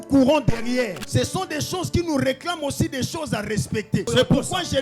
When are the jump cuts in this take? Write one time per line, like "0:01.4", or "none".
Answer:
0:01.0
0:04.1